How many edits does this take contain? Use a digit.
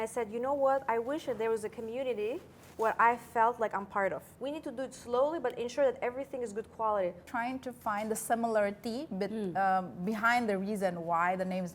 2